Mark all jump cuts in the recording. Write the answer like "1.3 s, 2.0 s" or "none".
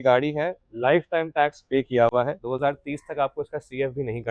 2.4 s